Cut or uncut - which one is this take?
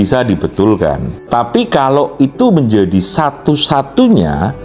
cut